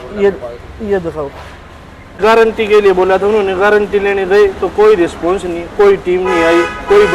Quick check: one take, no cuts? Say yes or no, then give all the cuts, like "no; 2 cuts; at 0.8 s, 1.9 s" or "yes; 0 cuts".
no; 1 cut; at 2.1 s